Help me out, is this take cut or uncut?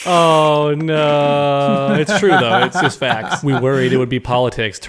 cut